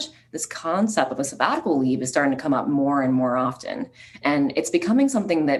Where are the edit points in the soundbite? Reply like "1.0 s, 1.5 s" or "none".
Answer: none